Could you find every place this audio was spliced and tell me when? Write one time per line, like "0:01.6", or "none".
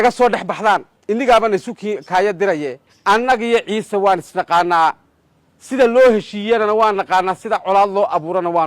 0:00.9
0:02.8